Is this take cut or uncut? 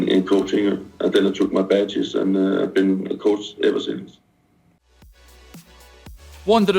cut